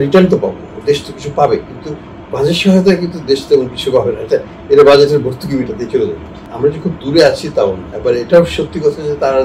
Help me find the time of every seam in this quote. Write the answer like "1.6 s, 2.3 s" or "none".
6.4 s, 7.9 s